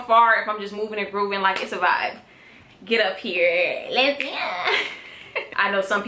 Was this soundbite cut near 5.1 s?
yes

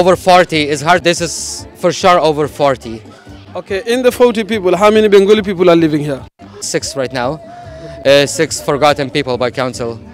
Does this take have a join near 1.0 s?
yes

